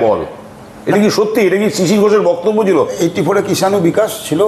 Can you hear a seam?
yes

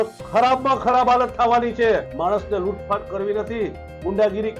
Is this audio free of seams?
no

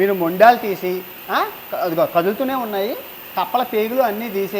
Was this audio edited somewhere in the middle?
no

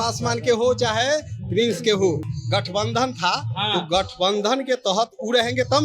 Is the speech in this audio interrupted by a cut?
yes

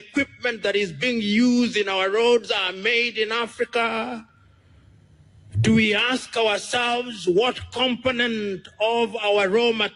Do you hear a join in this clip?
no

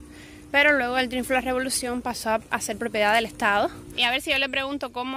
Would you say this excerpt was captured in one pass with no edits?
no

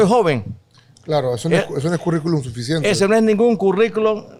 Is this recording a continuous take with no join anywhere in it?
yes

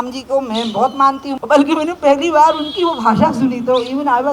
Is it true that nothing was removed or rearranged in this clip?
no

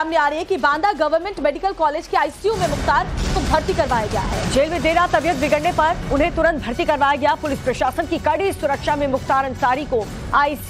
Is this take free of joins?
no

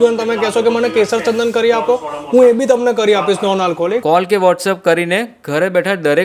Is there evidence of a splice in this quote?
yes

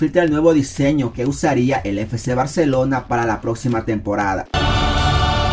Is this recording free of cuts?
no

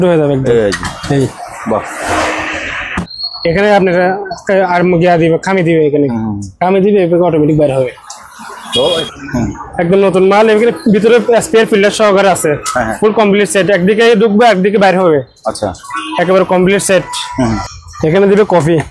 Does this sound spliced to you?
yes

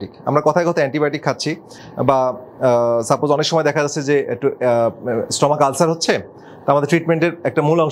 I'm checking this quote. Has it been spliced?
no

